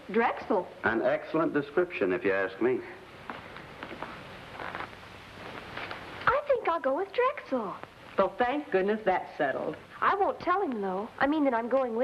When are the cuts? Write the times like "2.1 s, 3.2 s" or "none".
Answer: none